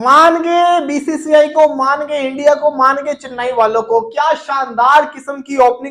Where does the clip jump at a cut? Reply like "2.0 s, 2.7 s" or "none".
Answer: none